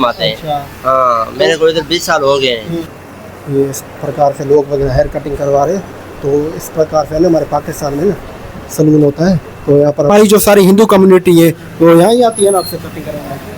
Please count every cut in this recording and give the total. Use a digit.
2